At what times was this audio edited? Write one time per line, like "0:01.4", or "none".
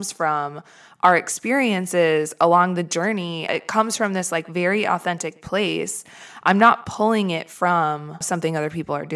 0:03.5
0:08.2